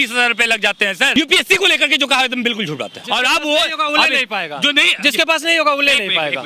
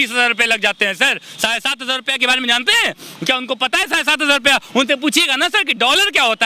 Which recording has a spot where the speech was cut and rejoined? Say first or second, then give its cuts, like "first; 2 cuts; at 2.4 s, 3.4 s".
first; 2 cuts; at 1.2 s, 3.0 s